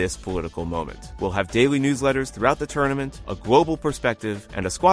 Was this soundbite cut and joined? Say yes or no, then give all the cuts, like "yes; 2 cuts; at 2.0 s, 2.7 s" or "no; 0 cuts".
no; 0 cuts